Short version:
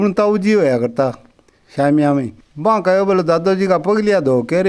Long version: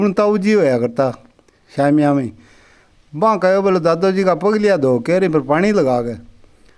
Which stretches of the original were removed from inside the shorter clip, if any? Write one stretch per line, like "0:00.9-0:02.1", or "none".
0:02.4-0:03.0